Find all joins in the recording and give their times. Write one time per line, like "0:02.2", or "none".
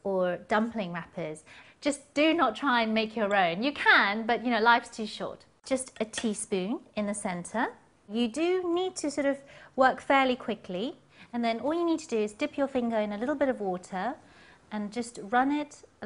none